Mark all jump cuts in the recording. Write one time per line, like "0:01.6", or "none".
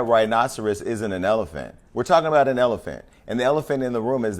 0:03.2